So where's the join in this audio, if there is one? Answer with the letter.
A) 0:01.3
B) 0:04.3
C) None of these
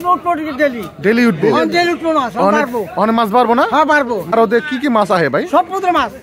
B